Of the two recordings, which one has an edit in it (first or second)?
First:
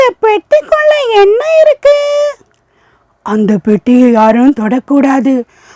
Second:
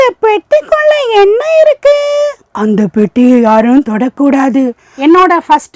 second